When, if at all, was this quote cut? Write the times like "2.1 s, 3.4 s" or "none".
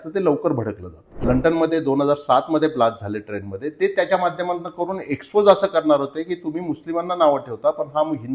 1.2 s

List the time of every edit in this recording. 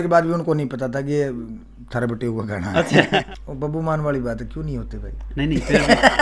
3.2 s

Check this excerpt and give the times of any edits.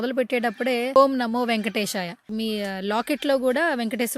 1.0 s

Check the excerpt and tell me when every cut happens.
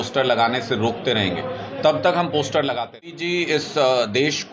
3.2 s

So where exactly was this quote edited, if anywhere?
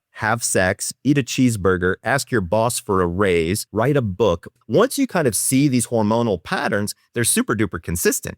3.6 s, 4.5 s

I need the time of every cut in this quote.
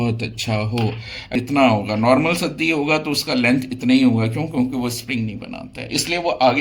1.3 s

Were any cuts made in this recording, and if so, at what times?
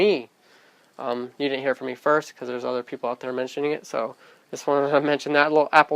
2.4 s

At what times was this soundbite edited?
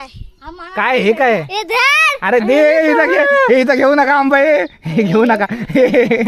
none

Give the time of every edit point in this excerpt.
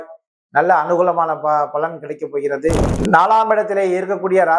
2.9 s

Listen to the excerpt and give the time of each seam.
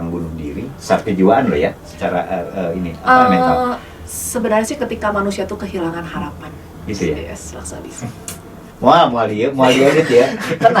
none

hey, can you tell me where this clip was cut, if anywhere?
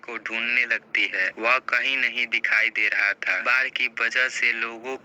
3.4 s

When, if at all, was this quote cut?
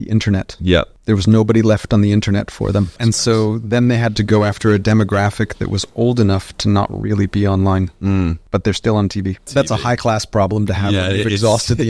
0.9 s, 3.0 s, 4.2 s, 8.4 s, 9.5 s

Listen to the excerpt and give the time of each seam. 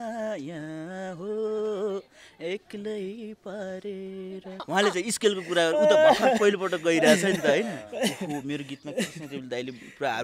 4.5 s

